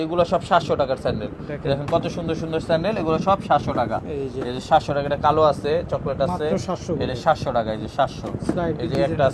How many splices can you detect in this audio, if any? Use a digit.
0